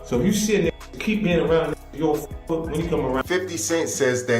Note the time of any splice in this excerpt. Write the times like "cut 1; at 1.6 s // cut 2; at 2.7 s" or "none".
cut 1; at 3.2 s